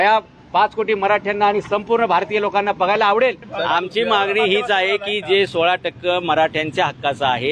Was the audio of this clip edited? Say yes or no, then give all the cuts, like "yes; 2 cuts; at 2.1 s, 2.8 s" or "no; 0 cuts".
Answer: yes; 1 cut; at 3.5 s